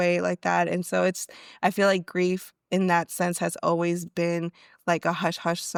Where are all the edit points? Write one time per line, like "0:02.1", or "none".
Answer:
none